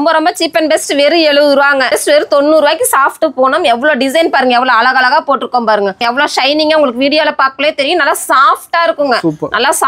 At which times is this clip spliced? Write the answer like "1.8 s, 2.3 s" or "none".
2.0 s, 6.0 s